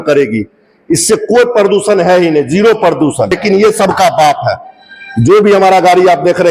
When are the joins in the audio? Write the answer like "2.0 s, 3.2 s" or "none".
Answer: 3.4 s